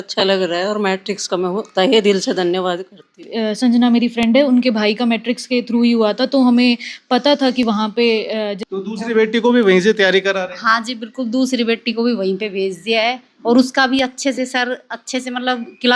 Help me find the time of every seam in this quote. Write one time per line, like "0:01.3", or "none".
0:03.3
0:08.6